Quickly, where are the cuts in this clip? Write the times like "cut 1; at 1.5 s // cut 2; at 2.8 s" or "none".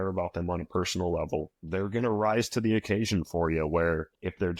none